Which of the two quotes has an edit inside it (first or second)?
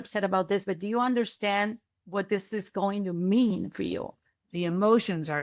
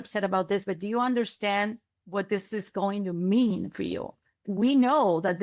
second